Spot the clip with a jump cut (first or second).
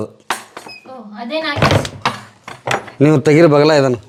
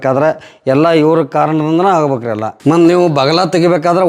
second